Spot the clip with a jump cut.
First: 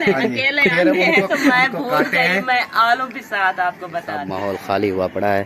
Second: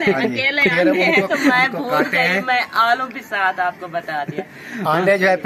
first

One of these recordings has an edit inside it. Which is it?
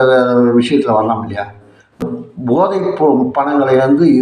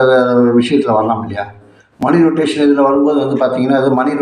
first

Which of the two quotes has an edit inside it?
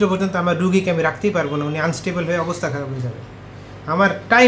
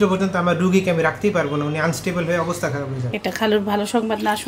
second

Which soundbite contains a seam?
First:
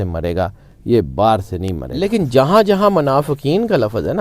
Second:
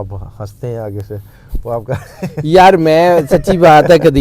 first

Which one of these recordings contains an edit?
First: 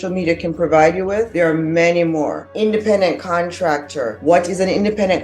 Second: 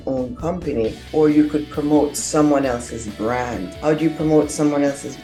first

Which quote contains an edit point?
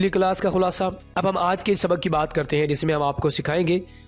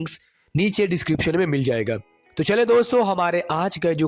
first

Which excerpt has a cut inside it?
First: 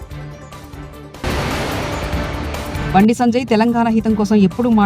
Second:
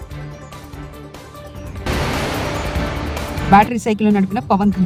first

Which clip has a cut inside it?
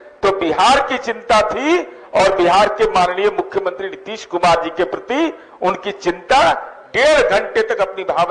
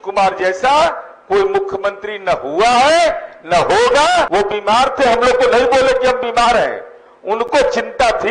second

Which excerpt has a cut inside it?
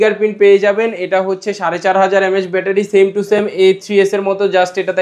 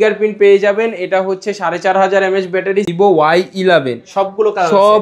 second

